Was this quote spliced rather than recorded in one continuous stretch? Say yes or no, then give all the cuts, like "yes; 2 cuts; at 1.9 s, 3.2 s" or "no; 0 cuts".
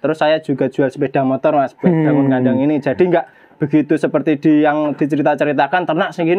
no; 0 cuts